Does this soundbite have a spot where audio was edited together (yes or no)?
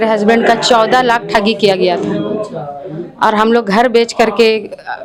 no